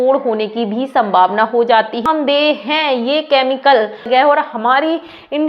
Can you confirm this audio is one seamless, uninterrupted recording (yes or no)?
no